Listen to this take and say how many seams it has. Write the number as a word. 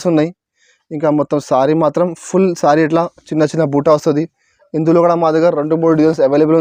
zero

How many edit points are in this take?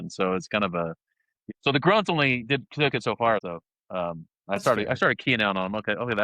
two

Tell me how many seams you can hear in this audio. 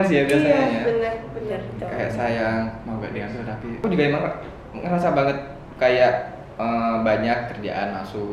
one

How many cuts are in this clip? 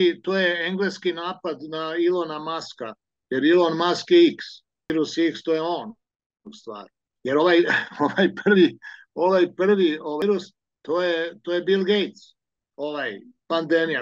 two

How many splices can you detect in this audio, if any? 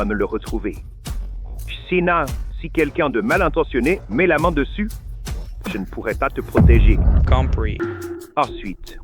one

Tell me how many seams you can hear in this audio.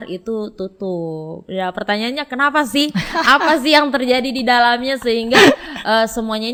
zero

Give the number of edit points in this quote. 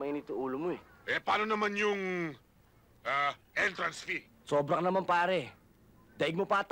two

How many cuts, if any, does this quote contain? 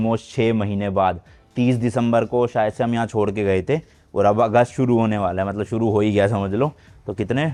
zero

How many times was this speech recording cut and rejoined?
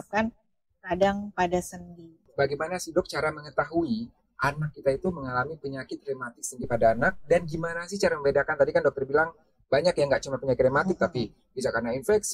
one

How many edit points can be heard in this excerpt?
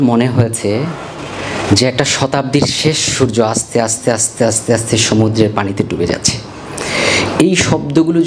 zero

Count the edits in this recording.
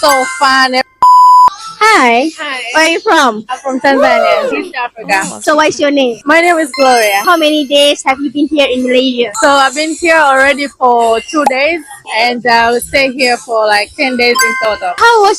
zero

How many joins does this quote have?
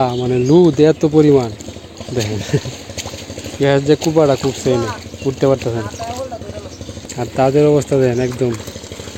one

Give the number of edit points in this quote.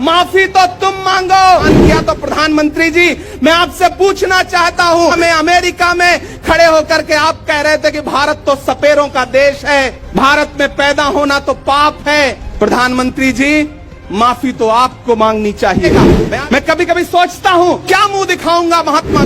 six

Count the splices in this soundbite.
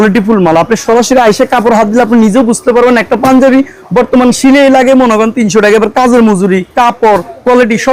zero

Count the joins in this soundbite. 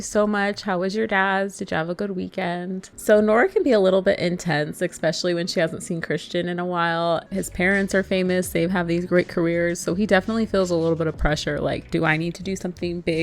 two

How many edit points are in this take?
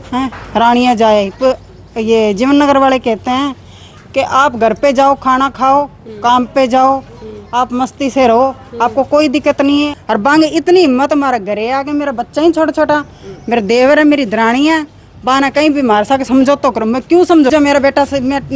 two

